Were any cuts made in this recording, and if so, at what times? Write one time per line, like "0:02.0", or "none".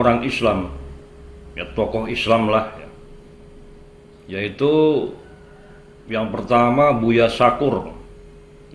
none